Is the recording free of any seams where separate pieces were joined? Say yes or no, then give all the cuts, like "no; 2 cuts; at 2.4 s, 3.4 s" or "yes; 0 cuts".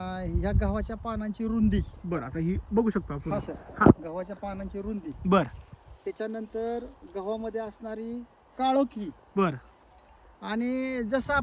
yes; 0 cuts